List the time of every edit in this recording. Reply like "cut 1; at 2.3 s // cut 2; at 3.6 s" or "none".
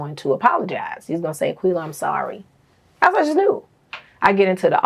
none